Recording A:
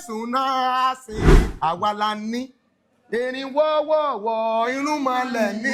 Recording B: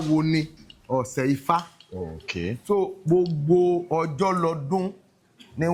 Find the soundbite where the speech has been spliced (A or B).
A